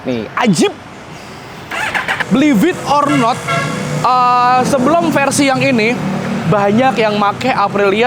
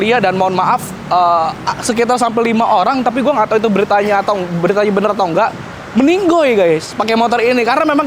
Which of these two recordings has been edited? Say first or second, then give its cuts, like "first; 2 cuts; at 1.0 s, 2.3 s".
first; 1 cut; at 2.2 s